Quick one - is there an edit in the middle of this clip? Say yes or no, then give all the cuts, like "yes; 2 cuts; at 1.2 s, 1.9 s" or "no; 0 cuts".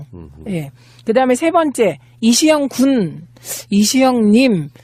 no; 0 cuts